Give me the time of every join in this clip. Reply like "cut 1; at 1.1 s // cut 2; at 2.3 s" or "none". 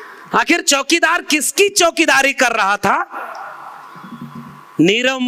none